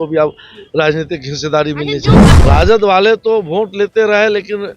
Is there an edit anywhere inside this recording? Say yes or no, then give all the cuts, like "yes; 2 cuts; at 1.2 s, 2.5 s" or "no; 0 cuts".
yes; 1 cut; at 2.3 s